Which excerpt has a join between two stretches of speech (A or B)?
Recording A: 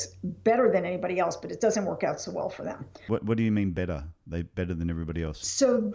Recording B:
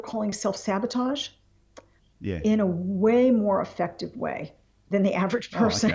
A